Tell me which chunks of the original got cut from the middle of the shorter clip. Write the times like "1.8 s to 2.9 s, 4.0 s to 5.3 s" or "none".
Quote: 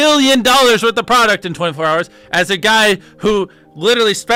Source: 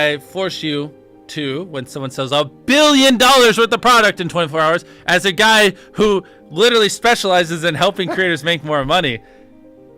none

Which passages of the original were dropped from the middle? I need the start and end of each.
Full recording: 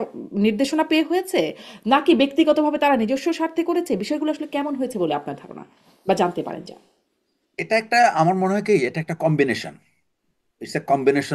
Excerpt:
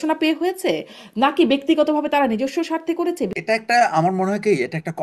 4.0 s to 7.6 s

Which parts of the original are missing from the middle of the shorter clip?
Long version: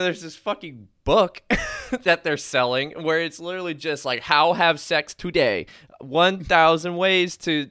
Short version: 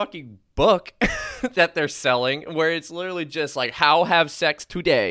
none

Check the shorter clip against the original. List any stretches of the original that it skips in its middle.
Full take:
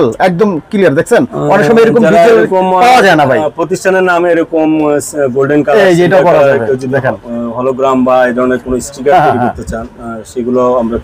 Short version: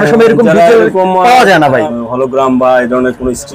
3.5 s to 7.4 s

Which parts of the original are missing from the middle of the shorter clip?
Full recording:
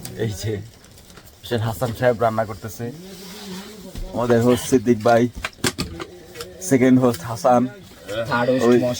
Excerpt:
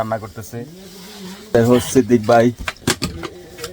3.8 s to 4.3 s

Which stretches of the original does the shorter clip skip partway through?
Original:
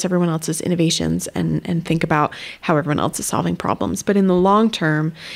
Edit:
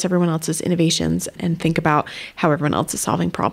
1.3 s to 1.6 s

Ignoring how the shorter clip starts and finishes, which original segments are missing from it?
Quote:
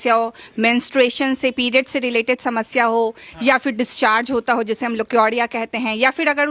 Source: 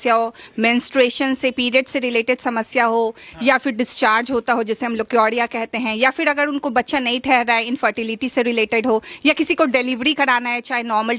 none

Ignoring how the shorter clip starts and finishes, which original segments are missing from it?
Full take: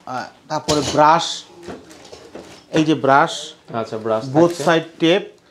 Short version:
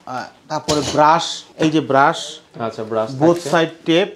1.4 s to 2.5 s

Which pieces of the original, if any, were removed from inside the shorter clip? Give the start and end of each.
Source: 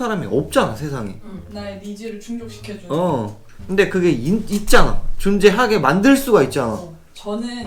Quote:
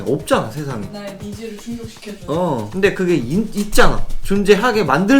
1.2 s to 1.5 s, 3.3 s to 3.6 s

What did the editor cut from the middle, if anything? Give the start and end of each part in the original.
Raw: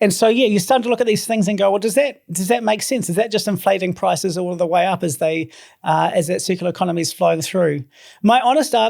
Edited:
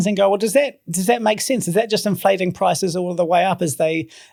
none

